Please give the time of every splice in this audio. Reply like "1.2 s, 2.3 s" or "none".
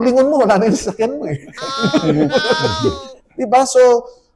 none